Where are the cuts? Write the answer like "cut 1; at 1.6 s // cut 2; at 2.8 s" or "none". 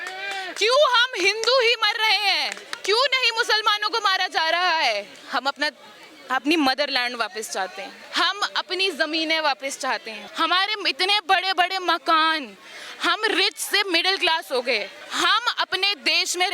cut 1; at 2.7 s // cut 2; at 5.2 s // cut 3; at 8.0 s // cut 4; at 10.2 s // cut 5; at 15.0 s